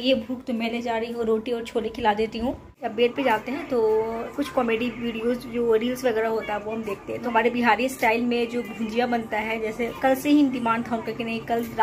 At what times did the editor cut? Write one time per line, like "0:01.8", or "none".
0:02.8
0:04.3
0:07.3
0:09.7